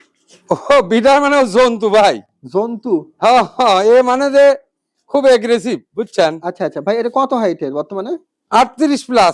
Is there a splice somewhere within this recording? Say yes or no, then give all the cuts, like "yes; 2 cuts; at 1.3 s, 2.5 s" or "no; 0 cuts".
no; 0 cuts